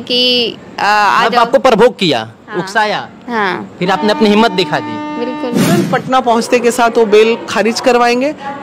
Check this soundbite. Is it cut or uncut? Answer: cut